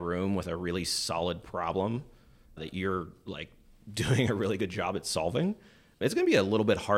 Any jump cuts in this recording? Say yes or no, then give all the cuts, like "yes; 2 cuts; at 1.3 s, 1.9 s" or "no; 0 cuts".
yes; 2 cuts; at 2.6 s, 6.0 s